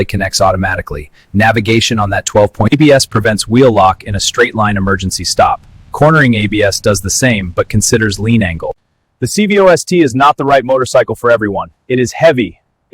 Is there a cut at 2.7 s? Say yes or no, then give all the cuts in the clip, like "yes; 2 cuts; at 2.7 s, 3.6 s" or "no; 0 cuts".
yes; 2 cuts; at 2.7 s, 8.7 s